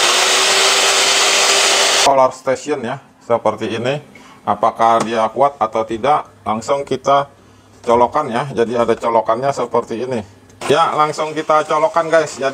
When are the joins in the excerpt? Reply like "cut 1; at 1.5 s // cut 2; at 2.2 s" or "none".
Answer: cut 1; at 2.0 s